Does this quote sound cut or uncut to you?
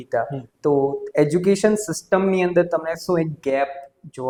uncut